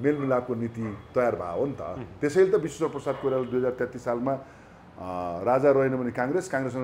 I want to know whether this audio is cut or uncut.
uncut